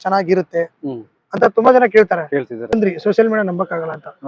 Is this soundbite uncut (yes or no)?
no